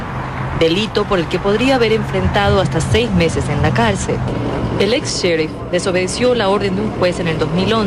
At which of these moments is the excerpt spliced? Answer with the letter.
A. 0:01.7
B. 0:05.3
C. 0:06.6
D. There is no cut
B